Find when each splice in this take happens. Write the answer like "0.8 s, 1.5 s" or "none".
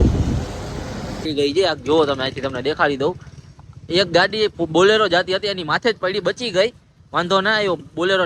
1.2 s